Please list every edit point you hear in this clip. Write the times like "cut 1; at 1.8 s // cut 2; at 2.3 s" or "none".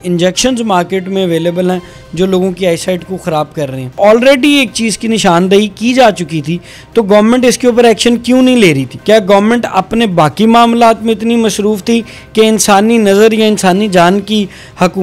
cut 1; at 3.9 s // cut 2; at 8.9 s